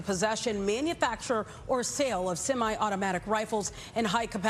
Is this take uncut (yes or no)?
yes